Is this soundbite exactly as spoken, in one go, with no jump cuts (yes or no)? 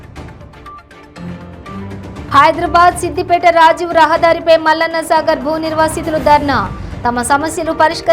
no